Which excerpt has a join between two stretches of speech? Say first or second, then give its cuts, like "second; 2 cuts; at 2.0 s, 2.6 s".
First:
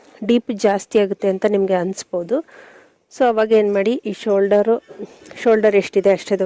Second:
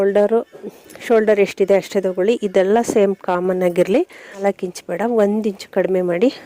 second; 1 cut; at 4.4 s